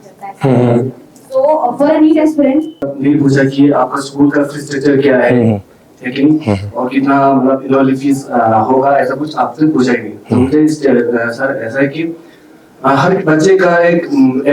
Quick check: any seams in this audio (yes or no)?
yes